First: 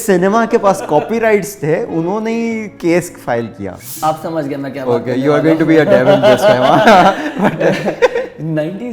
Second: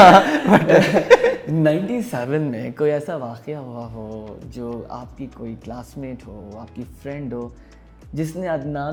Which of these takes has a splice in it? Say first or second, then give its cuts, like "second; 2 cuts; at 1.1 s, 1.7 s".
first; 1 cut; at 3.9 s